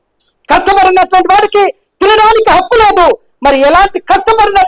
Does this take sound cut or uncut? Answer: uncut